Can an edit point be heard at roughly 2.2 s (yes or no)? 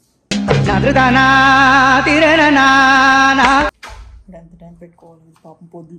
no